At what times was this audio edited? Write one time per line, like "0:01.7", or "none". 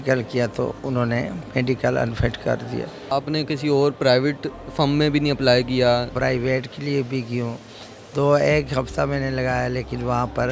0:03.0
0:06.1